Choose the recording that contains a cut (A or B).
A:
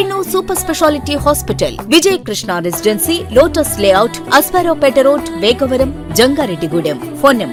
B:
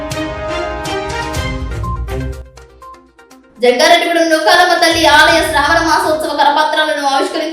B